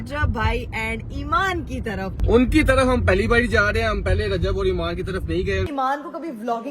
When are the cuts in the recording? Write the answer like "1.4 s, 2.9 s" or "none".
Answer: 2.2 s, 5.7 s

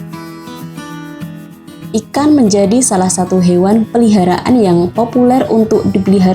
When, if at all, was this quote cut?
1.9 s

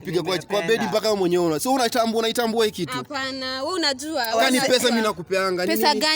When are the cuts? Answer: none

